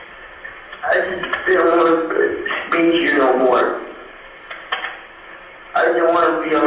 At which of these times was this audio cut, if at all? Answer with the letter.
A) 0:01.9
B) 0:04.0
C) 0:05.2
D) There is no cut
D